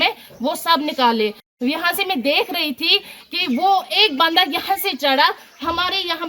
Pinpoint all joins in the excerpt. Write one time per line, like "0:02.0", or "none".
0:01.5